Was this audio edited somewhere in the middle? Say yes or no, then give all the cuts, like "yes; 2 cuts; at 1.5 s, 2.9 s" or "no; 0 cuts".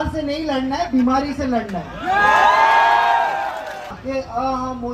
yes; 1 cut; at 4.0 s